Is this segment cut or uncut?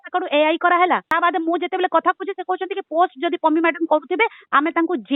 cut